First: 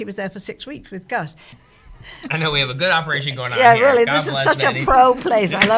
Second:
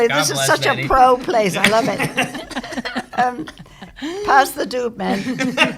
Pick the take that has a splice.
first; 1 cut; at 1.5 s

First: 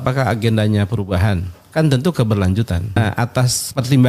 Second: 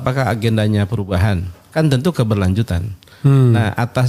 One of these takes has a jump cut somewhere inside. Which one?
first; 1 cut; at 3.2 s

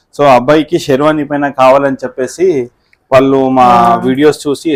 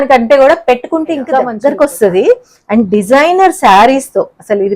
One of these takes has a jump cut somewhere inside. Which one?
second; 1 cut; at 1.5 s

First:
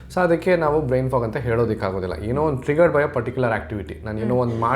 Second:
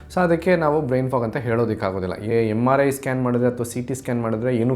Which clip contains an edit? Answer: second; 1 cut; at 2.3 s

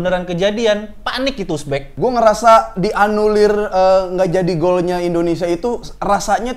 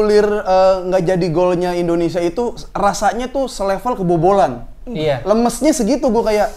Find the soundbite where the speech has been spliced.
first; 1 cut; at 1.8 s

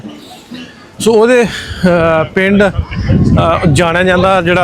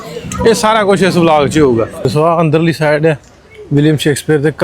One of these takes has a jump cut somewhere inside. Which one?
second; 1 cut; at 2.0 s

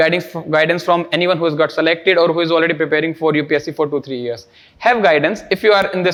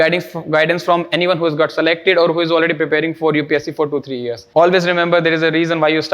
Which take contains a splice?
second; 1 cut; at 4.3 s

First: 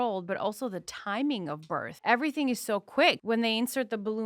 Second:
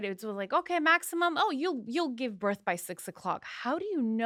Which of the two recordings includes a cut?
first; 2 cuts; at 1.9 s, 3.2 s

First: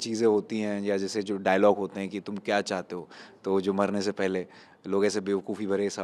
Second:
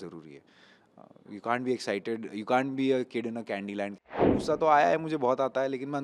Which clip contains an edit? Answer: second; 1 cut; at 4.2 s

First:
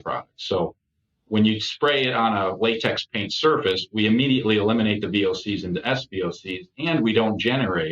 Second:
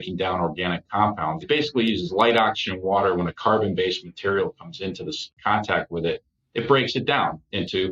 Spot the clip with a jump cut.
second; 2 cuts; at 1.4 s, 5.3 s

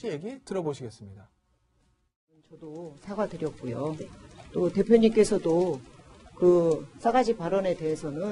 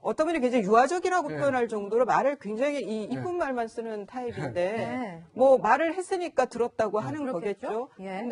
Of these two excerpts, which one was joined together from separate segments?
second; 1 cut; at 4.4 s

